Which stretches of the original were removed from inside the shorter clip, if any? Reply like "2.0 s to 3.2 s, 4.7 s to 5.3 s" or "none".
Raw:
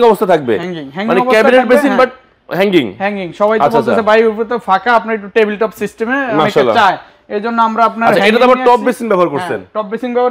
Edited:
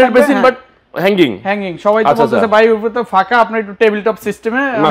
none